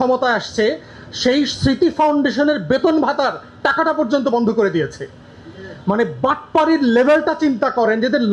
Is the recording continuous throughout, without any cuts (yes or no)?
yes